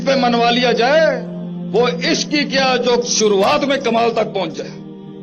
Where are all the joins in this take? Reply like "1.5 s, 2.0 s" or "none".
none